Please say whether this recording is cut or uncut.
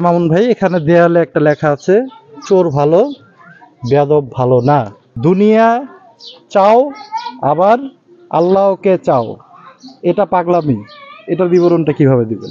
cut